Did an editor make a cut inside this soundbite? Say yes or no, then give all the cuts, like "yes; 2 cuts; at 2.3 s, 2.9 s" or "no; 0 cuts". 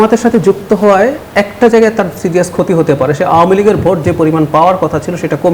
yes; 1 cut; at 1.2 s